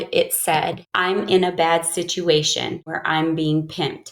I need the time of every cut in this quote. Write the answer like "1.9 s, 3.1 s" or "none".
2.9 s

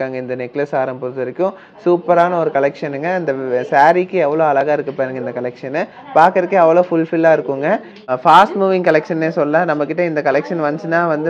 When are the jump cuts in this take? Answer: 8.0 s

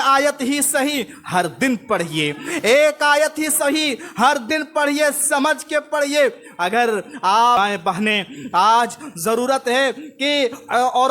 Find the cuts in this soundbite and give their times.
7.6 s

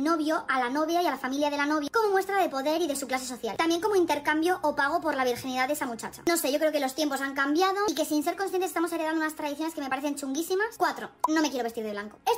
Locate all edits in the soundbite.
10.5 s

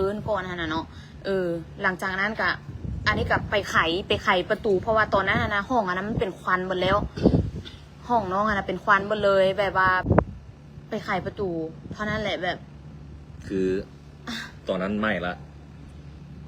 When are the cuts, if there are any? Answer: 10.1 s

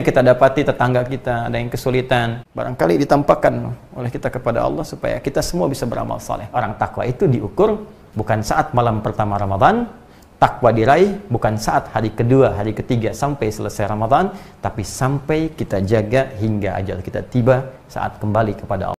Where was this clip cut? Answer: 2.4 s, 6.5 s

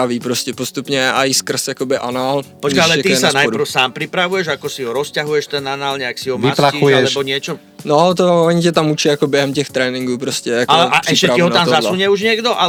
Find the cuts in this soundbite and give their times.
none

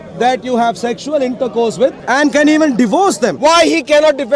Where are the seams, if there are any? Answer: 2.0 s, 3.3 s

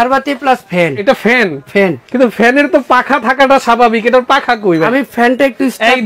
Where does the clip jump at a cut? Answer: 1.0 s, 2.0 s, 4.9 s

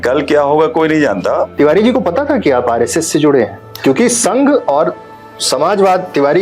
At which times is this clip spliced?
1.5 s

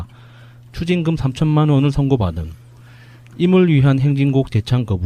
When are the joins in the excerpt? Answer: 3.9 s

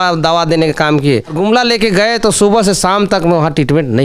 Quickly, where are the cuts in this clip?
1.4 s

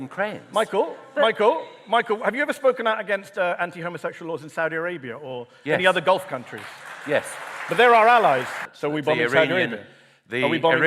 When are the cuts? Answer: 8.6 s

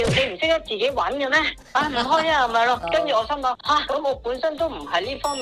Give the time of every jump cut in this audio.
2.8 s

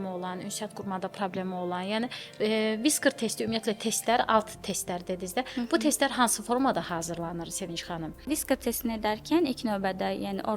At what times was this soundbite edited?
8.1 s

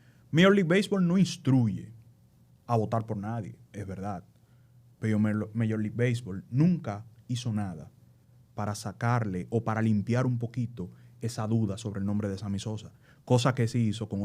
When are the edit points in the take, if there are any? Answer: none

